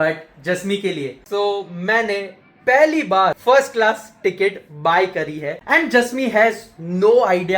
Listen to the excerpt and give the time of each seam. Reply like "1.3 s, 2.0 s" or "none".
1.2 s, 3.4 s, 5.6 s